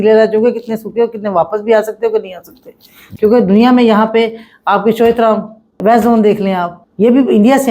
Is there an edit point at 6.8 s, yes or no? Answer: yes